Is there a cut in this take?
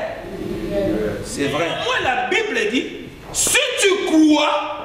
yes; 1 cut; at 1.8 s

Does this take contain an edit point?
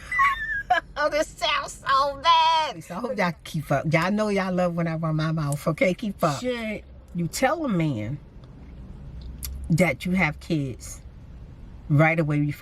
yes; 2 cuts; at 2.9 s, 6.6 s

